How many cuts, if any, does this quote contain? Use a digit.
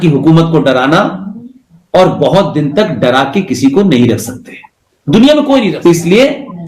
1